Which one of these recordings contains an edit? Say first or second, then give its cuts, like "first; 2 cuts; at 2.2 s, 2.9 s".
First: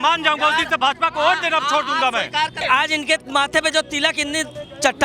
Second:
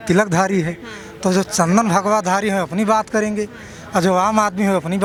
first; 1 cut; at 2.6 s